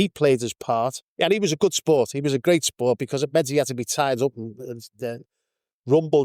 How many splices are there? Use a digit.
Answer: 1